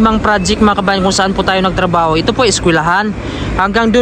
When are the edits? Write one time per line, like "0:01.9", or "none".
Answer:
none